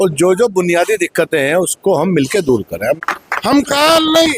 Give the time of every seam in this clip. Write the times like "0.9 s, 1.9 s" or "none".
3.0 s